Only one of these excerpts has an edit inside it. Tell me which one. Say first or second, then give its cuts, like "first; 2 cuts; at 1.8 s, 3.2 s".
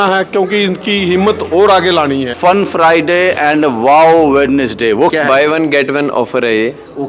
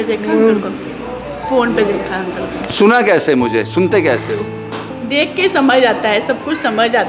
first; 2 cuts; at 2.3 s, 5.1 s